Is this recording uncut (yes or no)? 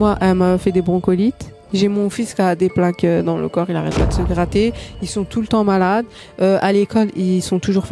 yes